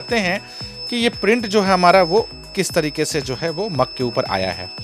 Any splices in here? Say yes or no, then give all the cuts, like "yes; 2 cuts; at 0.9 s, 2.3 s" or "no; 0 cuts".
no; 0 cuts